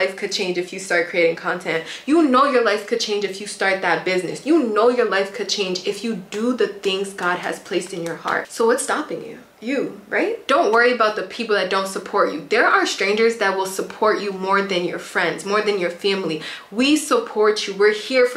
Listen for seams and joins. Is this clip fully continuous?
yes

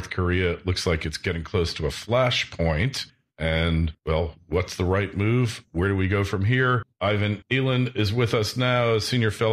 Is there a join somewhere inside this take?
no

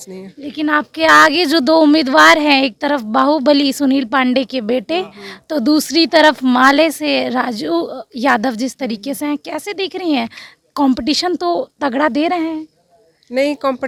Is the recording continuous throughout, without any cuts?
yes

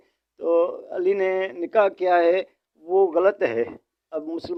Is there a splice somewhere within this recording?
no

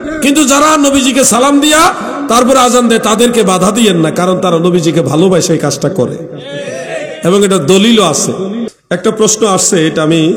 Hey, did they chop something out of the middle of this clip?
yes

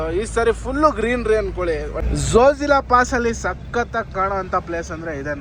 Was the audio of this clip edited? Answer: yes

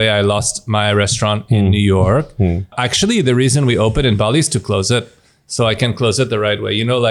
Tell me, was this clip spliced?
yes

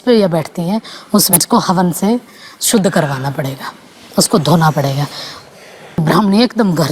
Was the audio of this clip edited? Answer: yes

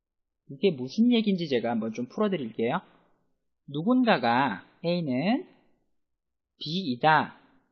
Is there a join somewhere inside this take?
no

